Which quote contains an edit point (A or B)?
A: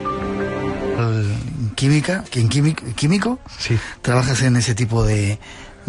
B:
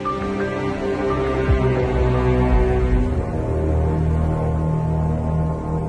B